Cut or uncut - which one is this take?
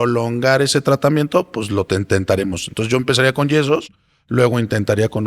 uncut